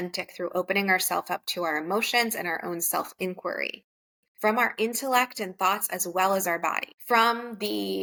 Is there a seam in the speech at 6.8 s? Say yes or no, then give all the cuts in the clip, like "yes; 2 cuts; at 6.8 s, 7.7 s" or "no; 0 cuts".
no; 0 cuts